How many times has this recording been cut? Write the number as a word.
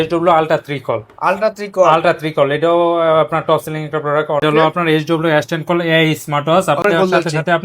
two